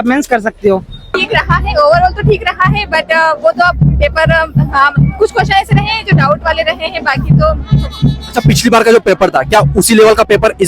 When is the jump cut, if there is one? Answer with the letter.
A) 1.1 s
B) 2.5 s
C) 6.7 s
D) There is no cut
A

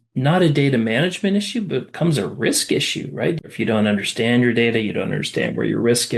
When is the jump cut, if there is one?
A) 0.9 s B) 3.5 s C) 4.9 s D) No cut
B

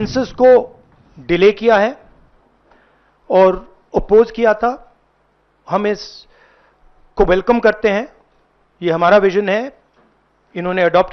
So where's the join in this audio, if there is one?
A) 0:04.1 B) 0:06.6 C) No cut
C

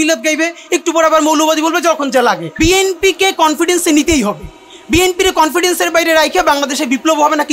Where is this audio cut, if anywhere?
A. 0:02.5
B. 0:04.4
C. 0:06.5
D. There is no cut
A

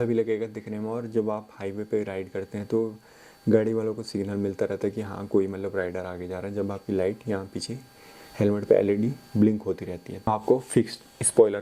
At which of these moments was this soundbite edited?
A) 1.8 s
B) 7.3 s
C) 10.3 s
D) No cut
C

